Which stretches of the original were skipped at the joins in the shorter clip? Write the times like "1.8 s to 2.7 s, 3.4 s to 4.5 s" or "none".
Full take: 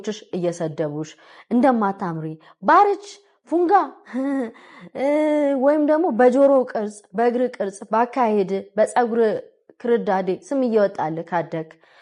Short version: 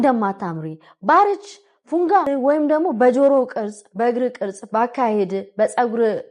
3.9 s to 5.5 s